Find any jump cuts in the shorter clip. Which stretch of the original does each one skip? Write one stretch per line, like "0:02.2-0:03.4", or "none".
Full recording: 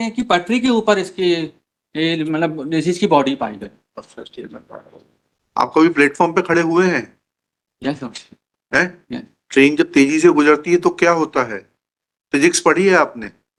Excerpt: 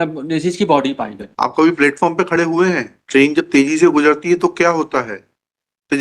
0:03.6-0:05.4
0:07.1-0:09.4